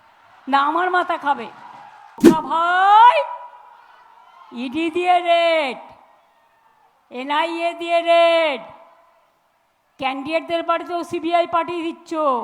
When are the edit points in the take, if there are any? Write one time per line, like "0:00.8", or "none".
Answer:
0:02.1